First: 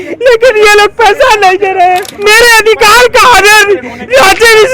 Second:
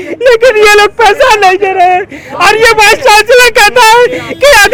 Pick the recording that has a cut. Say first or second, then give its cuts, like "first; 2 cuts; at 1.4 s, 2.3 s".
first; 1 cut; at 2.1 s